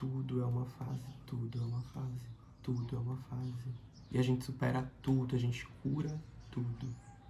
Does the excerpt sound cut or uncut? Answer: uncut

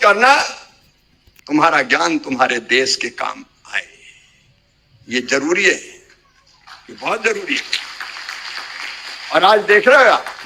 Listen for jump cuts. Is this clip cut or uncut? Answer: uncut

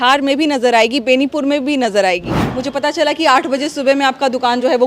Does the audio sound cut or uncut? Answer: cut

